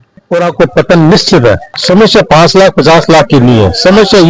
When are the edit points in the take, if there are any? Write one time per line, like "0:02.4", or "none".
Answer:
0:01.7